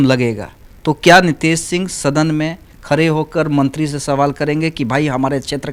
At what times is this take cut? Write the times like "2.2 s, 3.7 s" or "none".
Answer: none